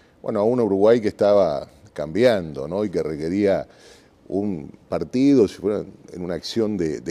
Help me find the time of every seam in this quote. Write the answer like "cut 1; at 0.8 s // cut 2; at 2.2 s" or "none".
cut 1; at 2.9 s